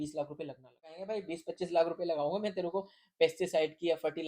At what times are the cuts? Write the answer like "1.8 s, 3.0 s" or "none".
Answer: 1.0 s